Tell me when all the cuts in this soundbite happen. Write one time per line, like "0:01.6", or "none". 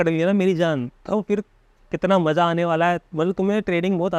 none